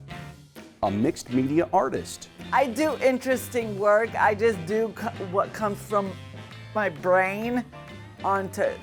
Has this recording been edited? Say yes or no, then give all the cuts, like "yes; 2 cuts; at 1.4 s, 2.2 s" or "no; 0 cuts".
no; 0 cuts